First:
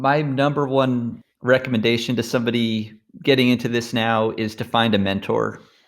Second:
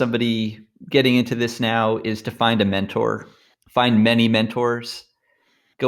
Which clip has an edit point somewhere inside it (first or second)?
first